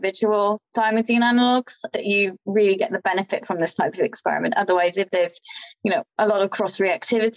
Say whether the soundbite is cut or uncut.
uncut